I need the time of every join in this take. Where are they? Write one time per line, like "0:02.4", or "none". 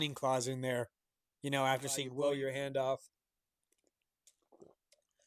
0:02.1